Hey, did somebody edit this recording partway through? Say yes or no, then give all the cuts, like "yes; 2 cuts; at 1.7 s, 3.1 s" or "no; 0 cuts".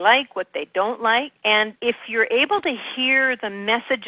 yes; 1 cut; at 1.6 s